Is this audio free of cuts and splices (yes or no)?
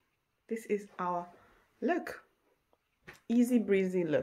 yes